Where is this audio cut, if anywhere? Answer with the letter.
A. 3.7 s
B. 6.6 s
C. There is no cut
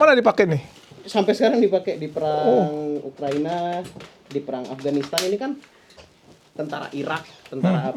C